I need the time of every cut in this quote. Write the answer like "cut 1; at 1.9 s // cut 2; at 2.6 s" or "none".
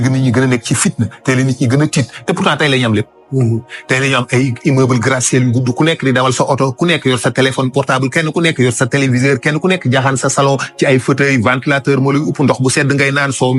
none